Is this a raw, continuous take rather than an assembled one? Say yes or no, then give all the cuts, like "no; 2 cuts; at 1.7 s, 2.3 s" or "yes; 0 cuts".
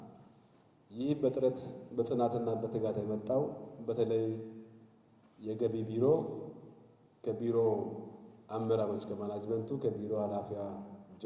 yes; 0 cuts